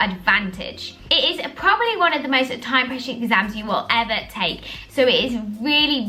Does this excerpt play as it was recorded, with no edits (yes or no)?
yes